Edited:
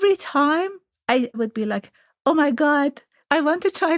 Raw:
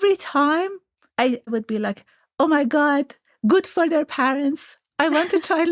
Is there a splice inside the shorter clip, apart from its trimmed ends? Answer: yes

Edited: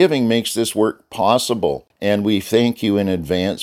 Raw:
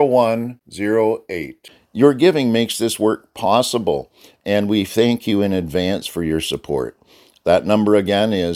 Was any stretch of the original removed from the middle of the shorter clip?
yes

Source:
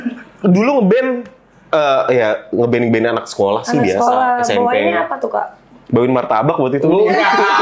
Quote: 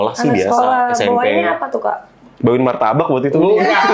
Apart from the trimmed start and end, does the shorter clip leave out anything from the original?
no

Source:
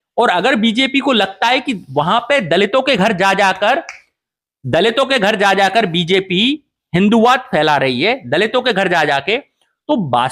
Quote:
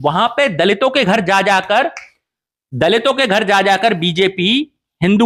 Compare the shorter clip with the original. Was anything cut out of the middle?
no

